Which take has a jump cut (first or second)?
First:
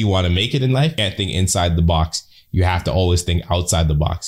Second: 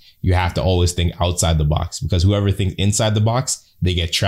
first